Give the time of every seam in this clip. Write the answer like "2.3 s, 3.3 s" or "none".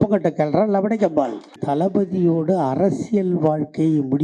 1.6 s